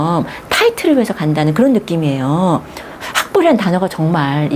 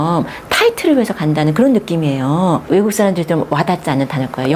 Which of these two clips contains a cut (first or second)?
second